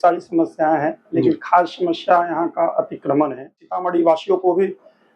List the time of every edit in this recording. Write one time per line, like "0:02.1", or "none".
0:03.8